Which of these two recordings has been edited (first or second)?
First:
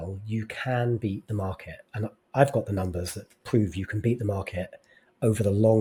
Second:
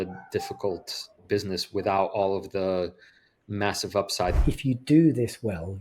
second